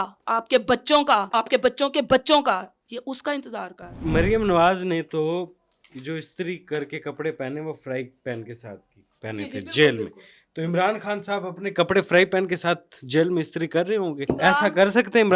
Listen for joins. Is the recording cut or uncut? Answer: cut